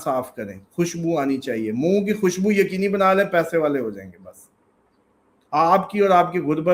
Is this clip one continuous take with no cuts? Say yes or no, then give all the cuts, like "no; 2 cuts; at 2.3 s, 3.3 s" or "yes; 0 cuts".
yes; 0 cuts